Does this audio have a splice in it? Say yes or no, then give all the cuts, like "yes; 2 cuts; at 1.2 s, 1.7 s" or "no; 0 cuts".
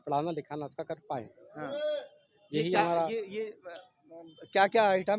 no; 0 cuts